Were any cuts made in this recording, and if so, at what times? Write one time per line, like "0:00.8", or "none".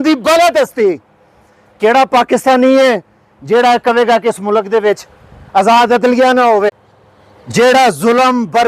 0:06.7